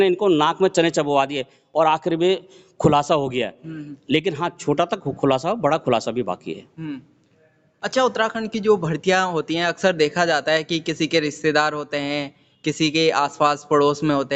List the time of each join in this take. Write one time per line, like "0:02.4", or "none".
none